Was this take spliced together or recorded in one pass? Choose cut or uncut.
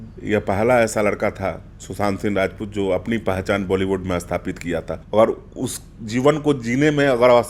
cut